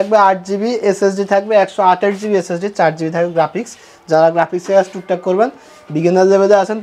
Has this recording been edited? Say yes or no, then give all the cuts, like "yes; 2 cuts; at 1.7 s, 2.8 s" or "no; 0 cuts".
no; 0 cuts